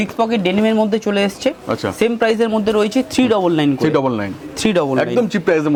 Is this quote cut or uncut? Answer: uncut